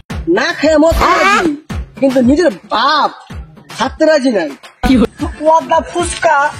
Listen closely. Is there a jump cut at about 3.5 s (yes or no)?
no